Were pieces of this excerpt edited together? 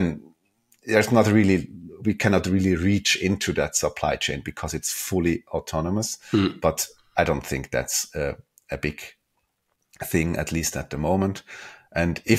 no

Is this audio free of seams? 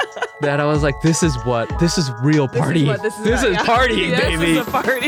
yes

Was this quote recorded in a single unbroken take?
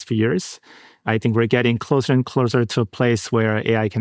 no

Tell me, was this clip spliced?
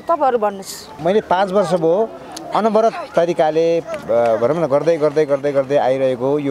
yes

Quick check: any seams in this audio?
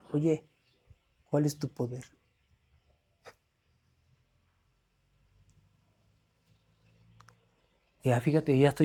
no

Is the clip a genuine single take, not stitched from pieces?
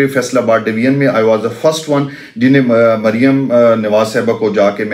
yes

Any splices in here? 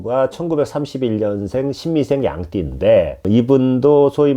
yes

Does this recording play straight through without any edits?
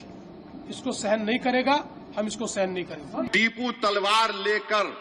no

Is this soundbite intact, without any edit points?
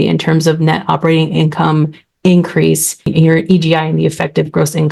no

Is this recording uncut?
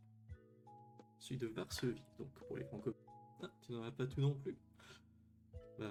yes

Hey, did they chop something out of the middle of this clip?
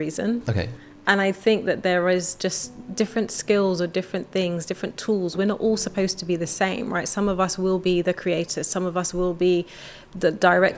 no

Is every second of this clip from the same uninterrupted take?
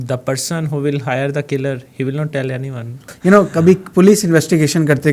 no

